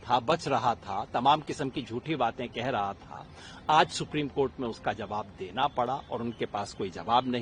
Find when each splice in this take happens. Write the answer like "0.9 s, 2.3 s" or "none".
none